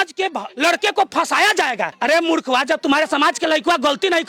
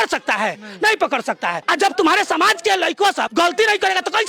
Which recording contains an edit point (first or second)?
second